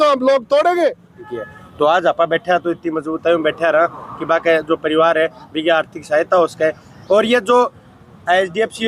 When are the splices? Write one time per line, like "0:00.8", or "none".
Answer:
0:01.1